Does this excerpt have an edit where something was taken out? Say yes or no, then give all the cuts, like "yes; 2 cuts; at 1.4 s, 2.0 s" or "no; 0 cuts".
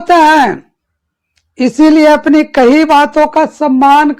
no; 0 cuts